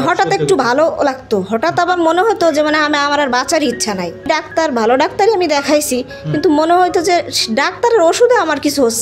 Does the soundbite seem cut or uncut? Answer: cut